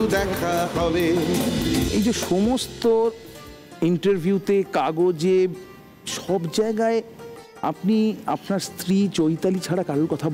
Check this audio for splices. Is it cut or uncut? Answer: cut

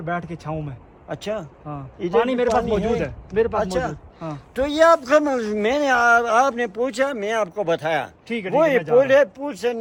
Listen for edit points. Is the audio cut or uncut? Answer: uncut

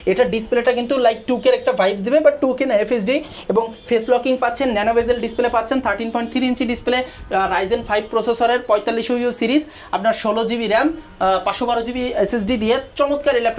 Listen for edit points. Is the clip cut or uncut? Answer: uncut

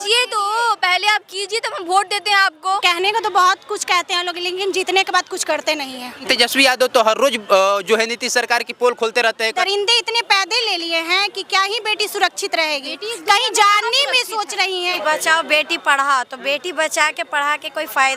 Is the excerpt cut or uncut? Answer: cut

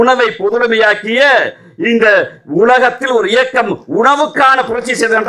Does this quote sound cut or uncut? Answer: uncut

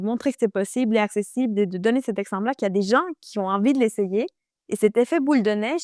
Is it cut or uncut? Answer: uncut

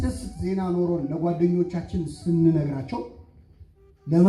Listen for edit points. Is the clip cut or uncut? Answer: uncut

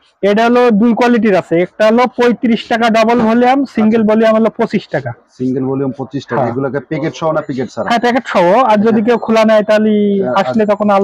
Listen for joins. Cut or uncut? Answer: uncut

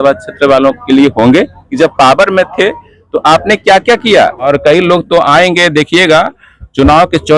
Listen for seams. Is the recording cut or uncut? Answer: cut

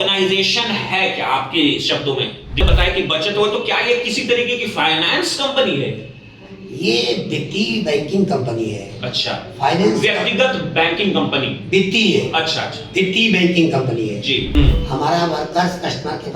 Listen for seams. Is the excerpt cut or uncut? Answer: cut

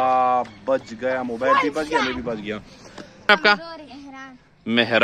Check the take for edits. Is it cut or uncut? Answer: cut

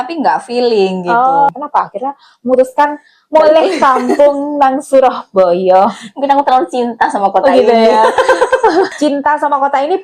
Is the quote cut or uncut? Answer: cut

